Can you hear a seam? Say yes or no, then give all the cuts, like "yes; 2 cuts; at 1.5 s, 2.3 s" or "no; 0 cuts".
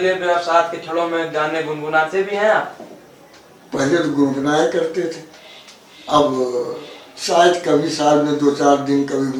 no; 0 cuts